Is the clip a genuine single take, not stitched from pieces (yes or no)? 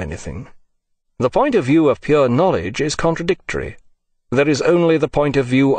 no